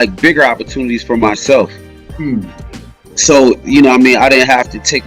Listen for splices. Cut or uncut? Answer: uncut